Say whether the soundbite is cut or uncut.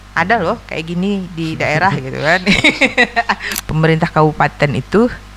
cut